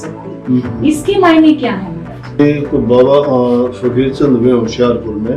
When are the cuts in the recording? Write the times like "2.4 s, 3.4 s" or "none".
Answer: 2.4 s